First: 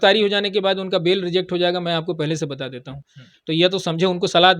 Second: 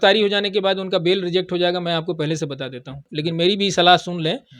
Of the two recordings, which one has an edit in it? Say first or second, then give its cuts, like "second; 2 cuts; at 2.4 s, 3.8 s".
second; 1 cut; at 3.1 s